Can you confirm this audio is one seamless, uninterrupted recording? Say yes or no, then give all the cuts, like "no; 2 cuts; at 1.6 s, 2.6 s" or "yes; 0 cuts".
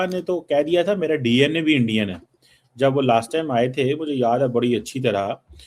yes; 0 cuts